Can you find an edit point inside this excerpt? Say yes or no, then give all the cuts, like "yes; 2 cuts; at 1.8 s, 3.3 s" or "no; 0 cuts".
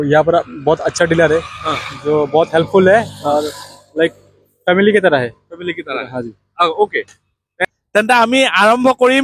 no; 0 cuts